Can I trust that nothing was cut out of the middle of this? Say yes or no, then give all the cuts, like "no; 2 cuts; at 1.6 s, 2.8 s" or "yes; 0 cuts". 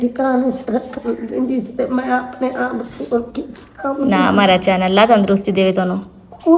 yes; 0 cuts